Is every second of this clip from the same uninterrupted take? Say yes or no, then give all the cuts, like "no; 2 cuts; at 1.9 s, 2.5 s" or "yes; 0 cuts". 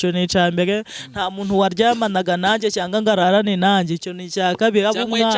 yes; 0 cuts